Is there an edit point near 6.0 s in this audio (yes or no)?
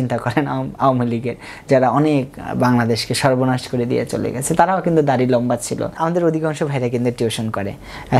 yes